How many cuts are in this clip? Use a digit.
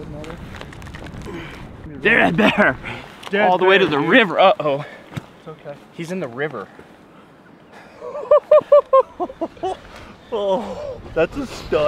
1